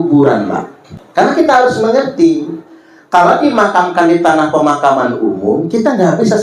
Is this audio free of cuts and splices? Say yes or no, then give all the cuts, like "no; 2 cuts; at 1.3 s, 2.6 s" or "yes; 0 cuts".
no; 1 cut; at 1.3 s